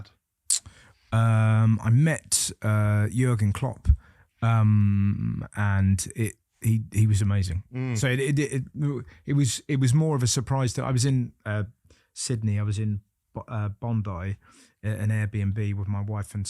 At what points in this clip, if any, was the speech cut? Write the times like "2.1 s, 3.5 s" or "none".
none